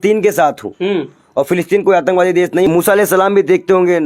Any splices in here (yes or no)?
yes